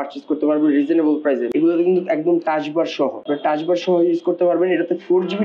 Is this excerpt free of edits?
no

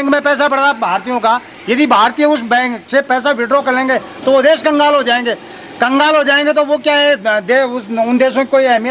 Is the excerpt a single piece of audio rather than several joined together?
yes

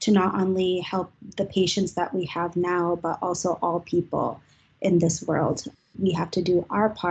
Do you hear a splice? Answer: yes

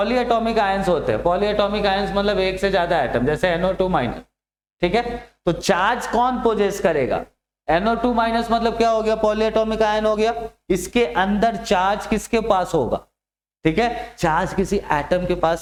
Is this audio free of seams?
yes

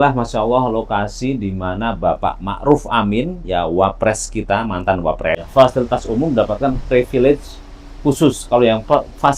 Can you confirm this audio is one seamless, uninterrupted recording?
no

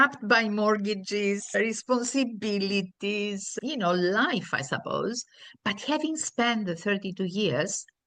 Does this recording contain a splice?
no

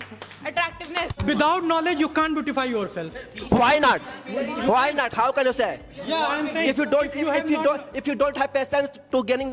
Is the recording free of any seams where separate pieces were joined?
no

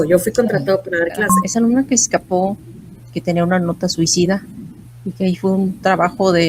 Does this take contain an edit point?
yes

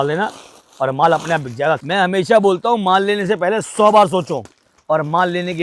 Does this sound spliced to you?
yes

